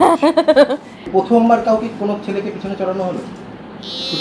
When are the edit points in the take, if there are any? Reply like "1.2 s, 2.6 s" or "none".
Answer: 1.1 s